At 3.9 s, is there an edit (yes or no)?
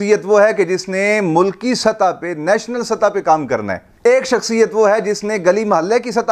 no